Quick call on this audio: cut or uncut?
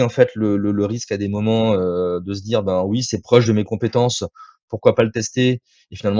uncut